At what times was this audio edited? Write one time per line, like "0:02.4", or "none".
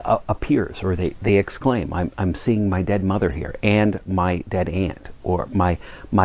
none